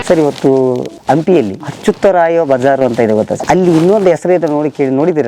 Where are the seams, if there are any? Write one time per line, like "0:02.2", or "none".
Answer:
0:00.9
0:03.4